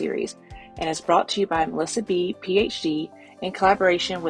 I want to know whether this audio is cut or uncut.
uncut